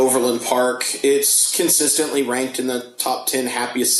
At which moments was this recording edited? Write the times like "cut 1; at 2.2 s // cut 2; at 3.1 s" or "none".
none